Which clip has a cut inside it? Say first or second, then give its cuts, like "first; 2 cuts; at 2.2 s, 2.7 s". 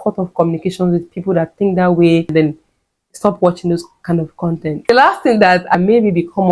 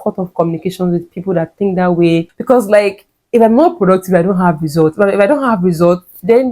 second; 1 cut; at 2.3 s